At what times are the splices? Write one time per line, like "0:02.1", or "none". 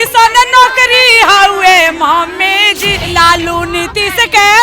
0:03.1